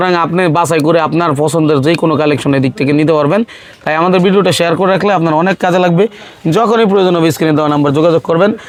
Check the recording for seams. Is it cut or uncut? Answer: uncut